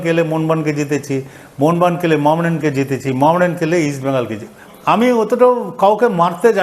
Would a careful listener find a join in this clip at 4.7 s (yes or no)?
yes